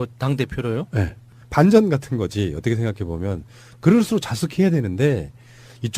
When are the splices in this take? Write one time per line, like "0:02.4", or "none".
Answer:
0:03.8